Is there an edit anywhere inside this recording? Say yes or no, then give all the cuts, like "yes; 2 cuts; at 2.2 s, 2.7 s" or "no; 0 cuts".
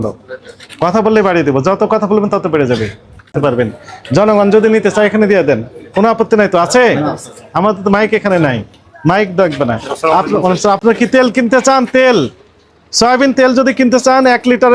no; 0 cuts